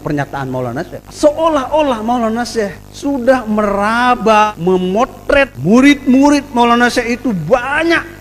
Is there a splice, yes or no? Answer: yes